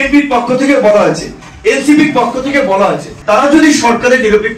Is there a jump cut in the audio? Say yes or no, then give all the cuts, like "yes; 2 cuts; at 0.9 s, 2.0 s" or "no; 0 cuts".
yes; 1 cut; at 3.1 s